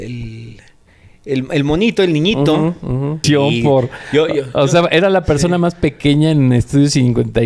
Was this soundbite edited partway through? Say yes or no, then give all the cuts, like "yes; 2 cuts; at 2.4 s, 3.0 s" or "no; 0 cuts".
yes; 1 cut; at 3.2 s